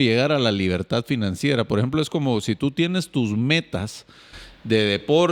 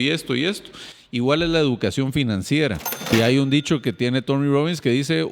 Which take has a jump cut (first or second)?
second